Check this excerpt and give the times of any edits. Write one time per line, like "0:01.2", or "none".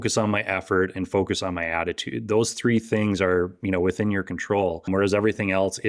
0:04.8